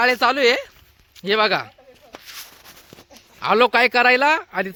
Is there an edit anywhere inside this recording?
no; 0 cuts

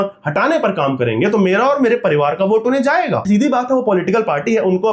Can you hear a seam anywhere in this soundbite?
yes; 1 cut; at 3.2 s

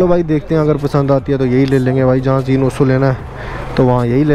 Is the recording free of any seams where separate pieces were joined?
yes; 0 cuts

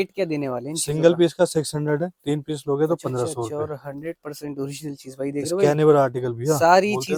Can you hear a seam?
no; 0 cuts

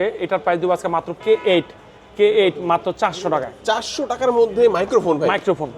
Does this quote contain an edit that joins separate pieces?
yes; 1 cut; at 1.2 s

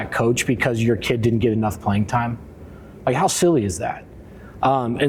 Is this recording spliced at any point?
no; 0 cuts

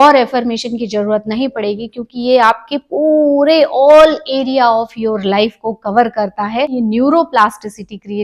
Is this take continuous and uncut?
no; 1 cut; at 6.7 s

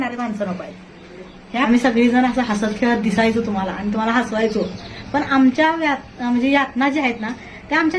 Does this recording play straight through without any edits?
no; 1 cut; at 1.6 s

